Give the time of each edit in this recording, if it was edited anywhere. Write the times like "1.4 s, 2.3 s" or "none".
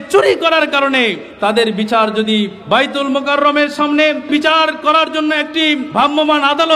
1.2 s, 2.6 s, 4.3 s, 5.9 s